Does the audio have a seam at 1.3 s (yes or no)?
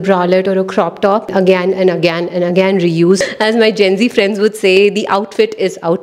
yes